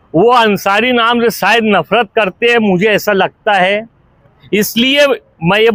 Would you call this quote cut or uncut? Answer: uncut